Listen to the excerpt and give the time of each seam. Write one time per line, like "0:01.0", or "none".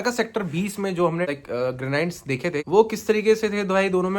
0:01.3
0:02.7